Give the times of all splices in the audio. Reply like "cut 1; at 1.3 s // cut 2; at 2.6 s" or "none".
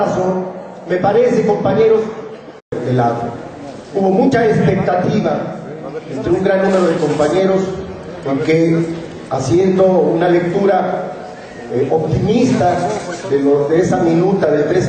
none